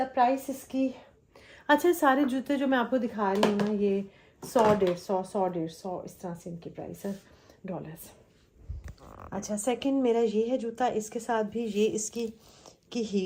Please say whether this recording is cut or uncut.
uncut